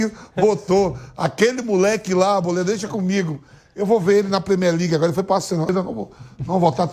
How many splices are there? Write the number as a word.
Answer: one